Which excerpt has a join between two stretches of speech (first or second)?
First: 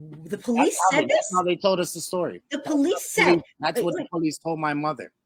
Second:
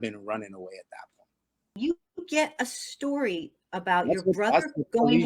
second